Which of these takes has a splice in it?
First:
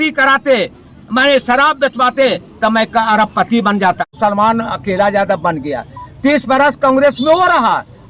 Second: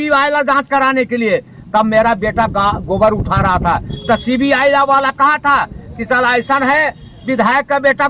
first; 1 cut; at 4.1 s

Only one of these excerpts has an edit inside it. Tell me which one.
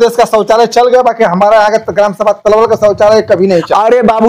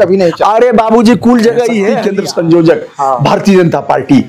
second; 1 cut; at 2.0 s

